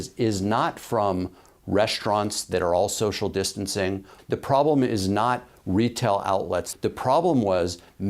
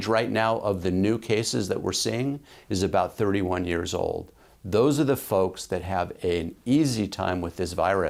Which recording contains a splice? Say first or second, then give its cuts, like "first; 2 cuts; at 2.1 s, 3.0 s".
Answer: first; 2 cuts; at 4.1 s, 6.7 s